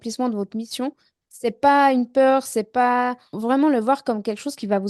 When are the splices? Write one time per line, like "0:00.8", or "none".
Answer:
0:01.1
0:03.3